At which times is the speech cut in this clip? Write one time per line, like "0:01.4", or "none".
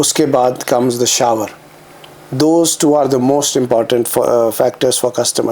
none